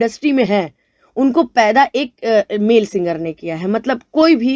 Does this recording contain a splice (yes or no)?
no